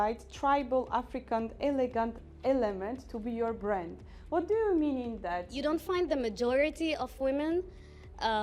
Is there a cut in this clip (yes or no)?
yes